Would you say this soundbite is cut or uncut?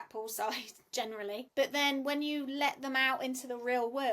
cut